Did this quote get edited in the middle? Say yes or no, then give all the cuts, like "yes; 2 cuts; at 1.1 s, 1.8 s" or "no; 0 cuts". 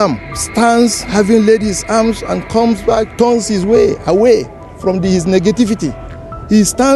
yes; 1 cut; at 1.0 s